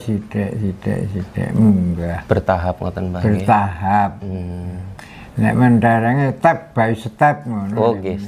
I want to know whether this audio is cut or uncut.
uncut